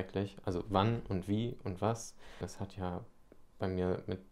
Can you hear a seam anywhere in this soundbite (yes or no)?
yes